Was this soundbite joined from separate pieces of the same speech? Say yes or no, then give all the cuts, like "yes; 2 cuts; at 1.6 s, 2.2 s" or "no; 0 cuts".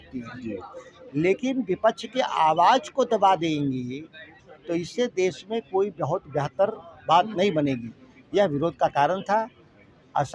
no; 0 cuts